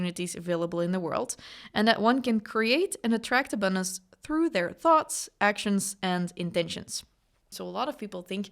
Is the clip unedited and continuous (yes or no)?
no